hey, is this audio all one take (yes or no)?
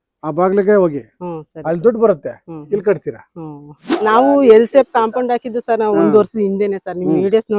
no